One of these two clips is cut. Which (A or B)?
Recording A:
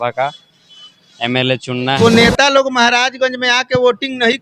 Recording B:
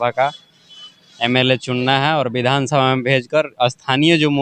A